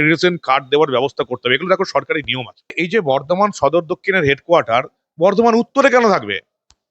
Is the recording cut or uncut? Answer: cut